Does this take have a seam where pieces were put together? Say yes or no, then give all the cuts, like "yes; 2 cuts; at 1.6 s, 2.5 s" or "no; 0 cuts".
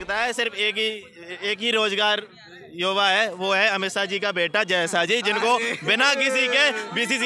no; 0 cuts